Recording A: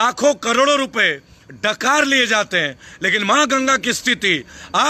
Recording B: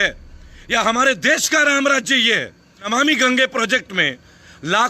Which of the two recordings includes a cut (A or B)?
B